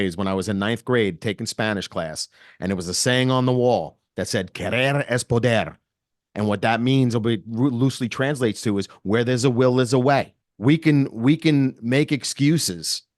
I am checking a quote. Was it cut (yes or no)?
yes